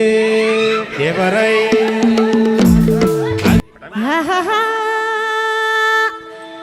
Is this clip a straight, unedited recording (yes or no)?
no